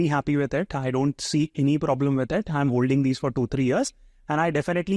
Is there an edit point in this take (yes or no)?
no